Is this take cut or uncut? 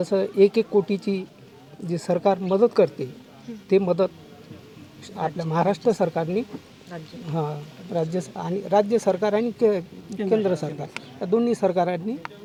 uncut